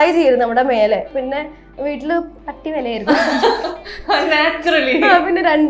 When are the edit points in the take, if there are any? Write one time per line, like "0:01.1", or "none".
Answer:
0:01.1
0:02.4